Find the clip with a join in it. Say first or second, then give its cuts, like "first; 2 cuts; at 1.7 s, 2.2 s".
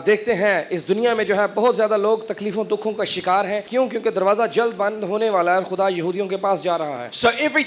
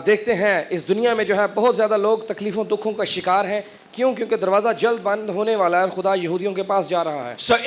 first; 1 cut; at 3.7 s